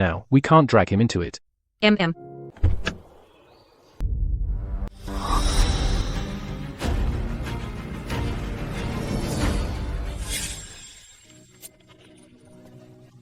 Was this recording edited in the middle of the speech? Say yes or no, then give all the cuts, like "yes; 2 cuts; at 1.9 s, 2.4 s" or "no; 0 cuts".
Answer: yes; 1 cut; at 4.0 s